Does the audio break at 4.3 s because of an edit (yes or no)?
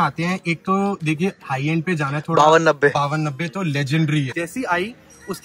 yes